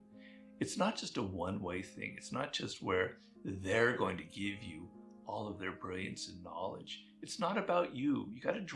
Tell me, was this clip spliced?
no; 0 cuts

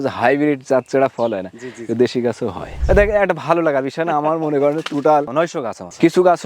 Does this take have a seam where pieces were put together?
yes; 1 cut; at 2.7 s

